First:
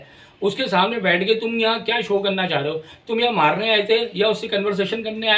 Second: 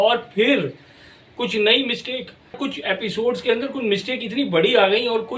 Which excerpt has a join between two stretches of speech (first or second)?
second